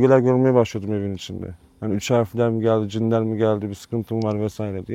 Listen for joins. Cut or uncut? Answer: uncut